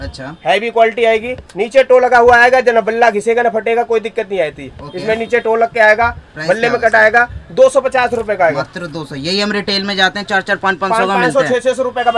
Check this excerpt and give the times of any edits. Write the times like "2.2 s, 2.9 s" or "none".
none